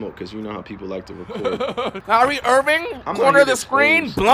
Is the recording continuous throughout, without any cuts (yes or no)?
no